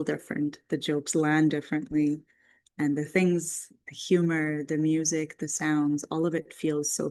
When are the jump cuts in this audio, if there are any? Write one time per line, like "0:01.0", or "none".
none